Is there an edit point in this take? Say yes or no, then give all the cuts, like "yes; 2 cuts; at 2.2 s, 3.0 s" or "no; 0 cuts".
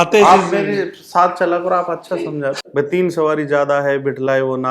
yes; 1 cut; at 2.6 s